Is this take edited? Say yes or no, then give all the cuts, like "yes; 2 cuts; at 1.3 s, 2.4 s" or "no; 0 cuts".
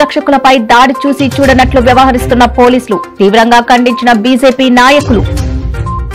no; 0 cuts